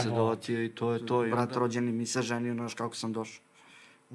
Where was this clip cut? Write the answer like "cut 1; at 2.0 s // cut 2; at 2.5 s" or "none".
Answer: cut 1; at 1.3 s